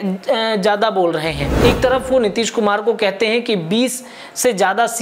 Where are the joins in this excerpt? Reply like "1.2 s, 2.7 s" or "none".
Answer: 1.4 s